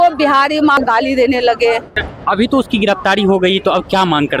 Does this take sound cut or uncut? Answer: cut